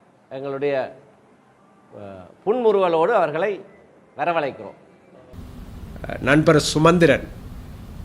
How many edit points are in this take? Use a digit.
1